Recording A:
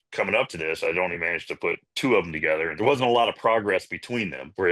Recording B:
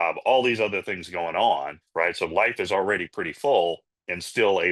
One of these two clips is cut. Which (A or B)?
A